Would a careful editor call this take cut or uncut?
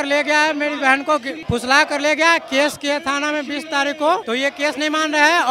uncut